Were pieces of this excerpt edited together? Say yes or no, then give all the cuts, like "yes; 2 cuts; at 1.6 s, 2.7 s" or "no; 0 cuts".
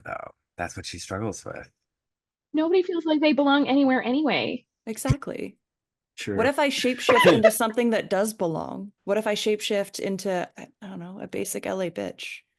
yes; 1 cut; at 8.9 s